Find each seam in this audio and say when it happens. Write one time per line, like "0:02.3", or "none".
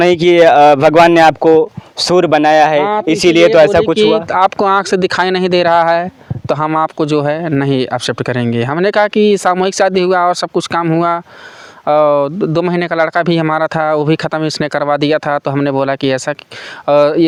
none